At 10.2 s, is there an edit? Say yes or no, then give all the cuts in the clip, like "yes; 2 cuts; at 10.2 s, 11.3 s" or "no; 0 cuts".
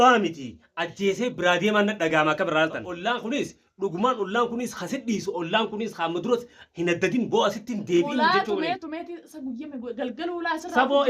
no; 1 cut; at 2.9 s